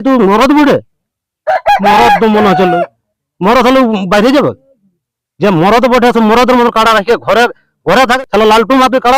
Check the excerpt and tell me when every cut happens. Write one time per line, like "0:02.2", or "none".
0:08.1

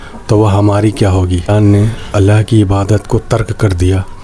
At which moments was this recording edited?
0:01.5

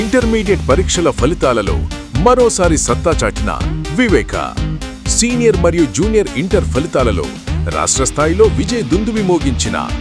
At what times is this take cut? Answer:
none

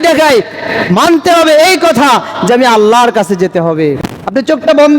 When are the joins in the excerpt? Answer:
0:04.0

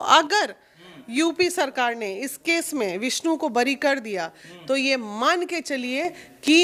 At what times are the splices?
none

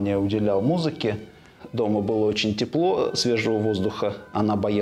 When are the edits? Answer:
0:01.5

